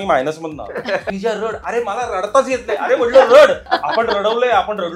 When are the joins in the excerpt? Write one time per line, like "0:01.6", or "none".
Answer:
0:01.1
0:03.7